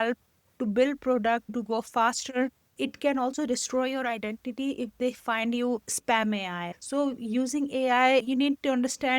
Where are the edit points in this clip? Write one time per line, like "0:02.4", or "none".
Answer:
0:01.5
0:02.7
0:06.7